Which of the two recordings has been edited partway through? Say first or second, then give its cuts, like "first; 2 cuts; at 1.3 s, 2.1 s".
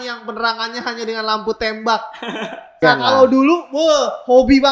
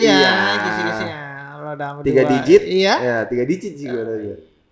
first; 1 cut; at 2.8 s